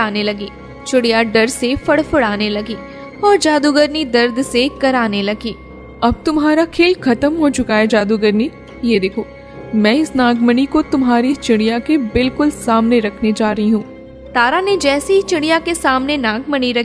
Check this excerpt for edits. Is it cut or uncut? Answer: uncut